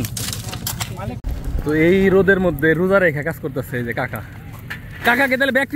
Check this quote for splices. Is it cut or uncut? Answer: cut